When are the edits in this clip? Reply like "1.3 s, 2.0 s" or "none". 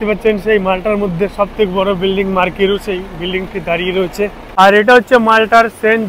4.4 s